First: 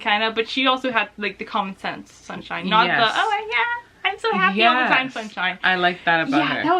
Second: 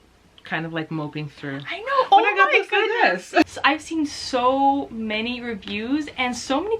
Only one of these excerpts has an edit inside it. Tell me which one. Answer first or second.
second